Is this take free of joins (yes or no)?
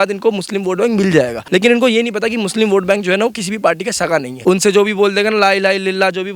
no